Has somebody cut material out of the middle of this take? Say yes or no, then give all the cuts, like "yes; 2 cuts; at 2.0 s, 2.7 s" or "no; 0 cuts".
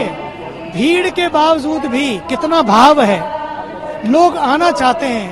no; 0 cuts